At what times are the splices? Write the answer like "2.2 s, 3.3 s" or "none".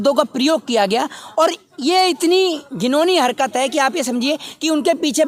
none